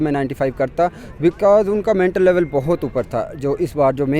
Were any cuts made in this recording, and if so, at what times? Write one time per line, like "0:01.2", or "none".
none